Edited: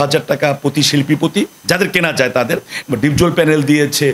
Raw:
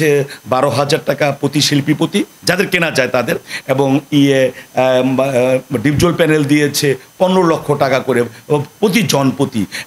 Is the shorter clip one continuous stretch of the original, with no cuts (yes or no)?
no